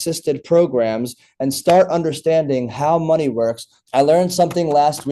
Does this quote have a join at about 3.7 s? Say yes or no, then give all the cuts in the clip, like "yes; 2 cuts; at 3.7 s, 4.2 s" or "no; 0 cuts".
yes; 1 cut; at 3.7 s